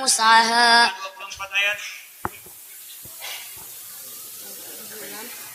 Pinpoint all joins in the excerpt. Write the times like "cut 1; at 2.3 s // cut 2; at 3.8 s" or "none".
none